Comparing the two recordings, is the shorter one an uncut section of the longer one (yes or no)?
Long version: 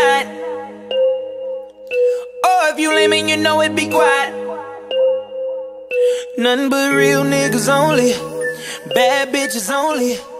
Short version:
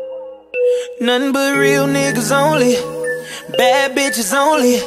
no